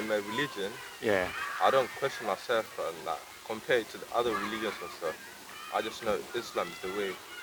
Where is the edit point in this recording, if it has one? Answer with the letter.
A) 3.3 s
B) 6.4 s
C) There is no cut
C